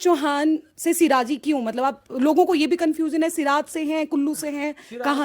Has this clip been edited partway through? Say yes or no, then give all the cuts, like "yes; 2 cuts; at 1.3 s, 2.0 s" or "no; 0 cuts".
no; 0 cuts